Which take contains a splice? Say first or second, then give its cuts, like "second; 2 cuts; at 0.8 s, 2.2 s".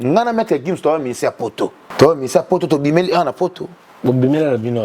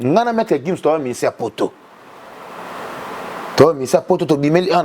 first; 1 cut; at 1.8 s